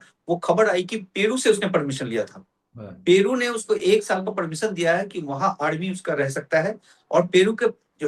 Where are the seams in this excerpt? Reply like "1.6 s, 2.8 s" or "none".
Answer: none